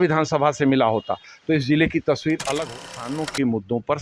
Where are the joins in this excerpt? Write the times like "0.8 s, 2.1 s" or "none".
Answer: 2.7 s